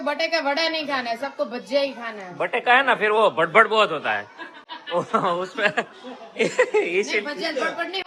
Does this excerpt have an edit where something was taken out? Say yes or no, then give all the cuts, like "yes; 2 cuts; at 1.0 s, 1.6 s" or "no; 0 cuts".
no; 0 cuts